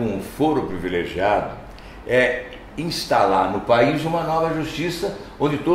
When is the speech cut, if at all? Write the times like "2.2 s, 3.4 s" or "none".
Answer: none